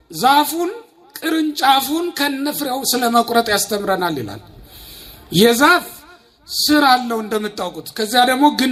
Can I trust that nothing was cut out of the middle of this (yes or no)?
yes